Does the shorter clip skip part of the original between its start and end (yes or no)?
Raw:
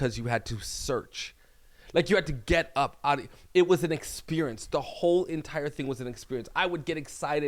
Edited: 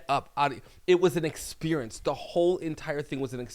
no